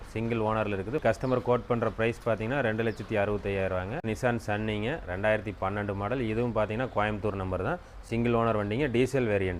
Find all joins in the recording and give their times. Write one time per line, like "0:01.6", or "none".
0:01.0
0:04.0